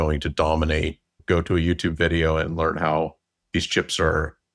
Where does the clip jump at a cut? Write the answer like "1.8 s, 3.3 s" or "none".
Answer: 1.2 s